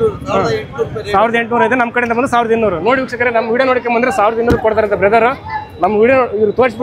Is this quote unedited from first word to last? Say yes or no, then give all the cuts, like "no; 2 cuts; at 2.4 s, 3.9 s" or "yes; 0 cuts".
yes; 0 cuts